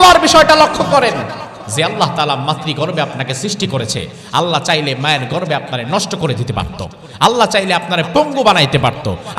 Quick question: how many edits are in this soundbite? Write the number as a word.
zero